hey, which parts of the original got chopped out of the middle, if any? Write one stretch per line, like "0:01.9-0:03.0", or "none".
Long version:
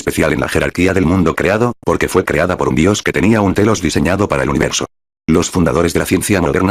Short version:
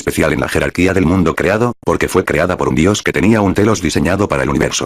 none